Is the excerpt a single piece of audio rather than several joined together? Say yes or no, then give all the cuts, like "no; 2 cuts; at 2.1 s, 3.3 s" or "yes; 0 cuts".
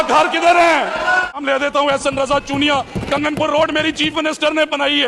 no; 1 cut; at 1.4 s